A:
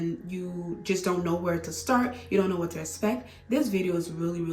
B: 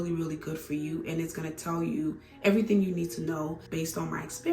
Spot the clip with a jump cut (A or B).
B